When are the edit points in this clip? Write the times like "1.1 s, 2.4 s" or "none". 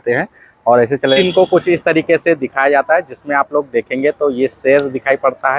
1.2 s